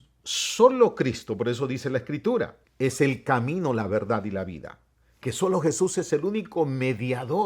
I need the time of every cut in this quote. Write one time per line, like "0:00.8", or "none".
0:02.6